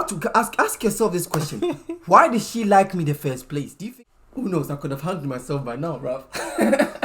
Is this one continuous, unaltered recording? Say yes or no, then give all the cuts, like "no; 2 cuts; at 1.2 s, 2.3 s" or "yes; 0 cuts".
no; 1 cut; at 3.8 s